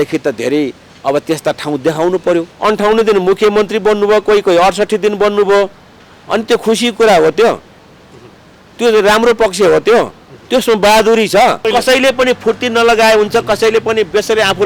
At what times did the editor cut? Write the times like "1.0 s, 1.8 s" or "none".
2.5 s, 11.6 s